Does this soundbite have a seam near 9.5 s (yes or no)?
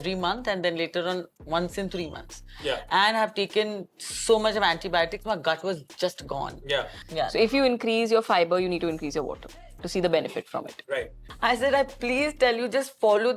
no